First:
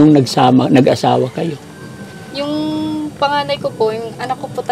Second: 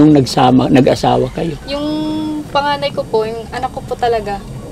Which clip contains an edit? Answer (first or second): second